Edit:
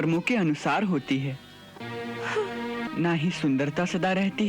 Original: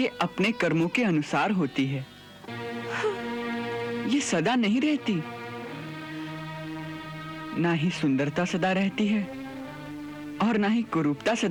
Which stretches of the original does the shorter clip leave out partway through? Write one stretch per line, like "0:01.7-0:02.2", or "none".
0:03.5-0:07.5